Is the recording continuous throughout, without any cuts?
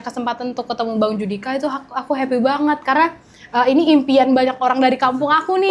yes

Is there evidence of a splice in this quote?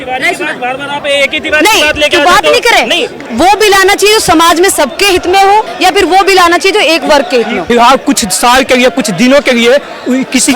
yes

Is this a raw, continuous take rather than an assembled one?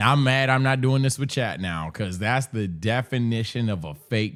yes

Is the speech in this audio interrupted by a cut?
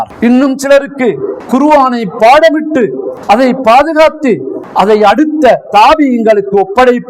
no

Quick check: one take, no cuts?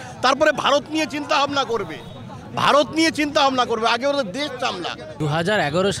yes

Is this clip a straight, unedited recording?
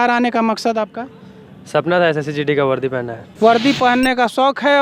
no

